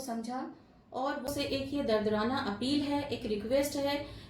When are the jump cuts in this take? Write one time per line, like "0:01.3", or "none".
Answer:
0:01.3